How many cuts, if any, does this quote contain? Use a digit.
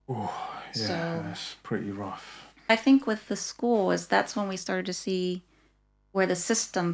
1